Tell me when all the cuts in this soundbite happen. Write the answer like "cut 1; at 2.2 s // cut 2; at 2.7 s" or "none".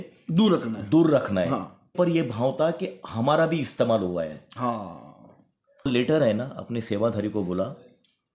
cut 1; at 1.9 s // cut 2; at 5.9 s